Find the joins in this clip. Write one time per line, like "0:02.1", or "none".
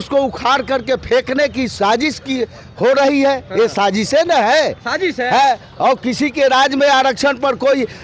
none